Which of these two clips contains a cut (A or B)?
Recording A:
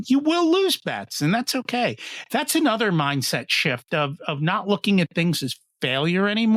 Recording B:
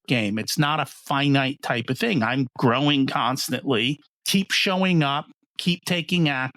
B